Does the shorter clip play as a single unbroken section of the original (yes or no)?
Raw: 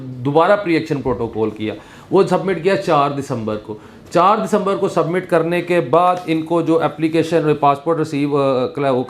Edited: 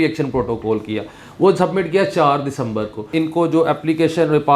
no